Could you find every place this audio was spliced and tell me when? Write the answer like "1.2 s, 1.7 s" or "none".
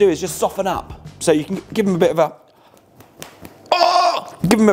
none